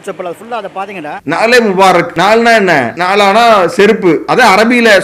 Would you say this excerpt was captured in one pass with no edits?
no; 3 cuts; at 1.2 s, 2.1 s, 3.0 s

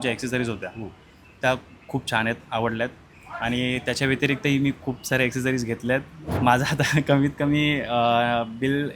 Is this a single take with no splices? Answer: no; 1 cut; at 6.4 s

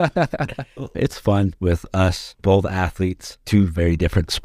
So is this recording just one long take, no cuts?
no; 1 cut; at 0.9 s

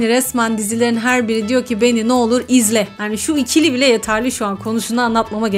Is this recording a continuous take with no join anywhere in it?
yes; 0 cuts

